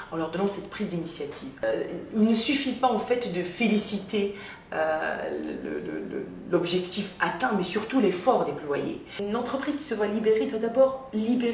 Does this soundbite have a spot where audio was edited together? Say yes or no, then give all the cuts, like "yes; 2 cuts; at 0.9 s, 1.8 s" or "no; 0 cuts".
yes; 2 cuts; at 1.6 s, 9.2 s